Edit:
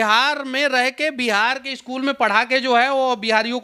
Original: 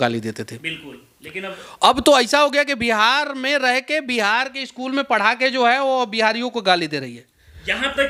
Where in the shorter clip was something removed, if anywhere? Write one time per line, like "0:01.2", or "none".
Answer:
none